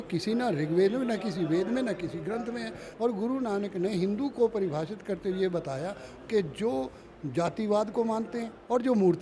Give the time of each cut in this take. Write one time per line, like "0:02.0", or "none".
0:02.8